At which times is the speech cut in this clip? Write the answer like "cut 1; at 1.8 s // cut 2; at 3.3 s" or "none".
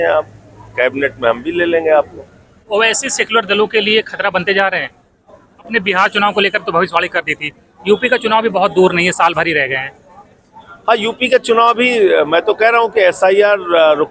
cut 1; at 2.5 s // cut 2; at 5.7 s